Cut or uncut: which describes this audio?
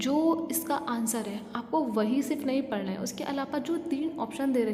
uncut